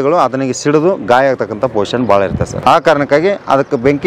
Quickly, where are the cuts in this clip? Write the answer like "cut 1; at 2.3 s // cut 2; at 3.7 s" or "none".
cut 1; at 2.5 s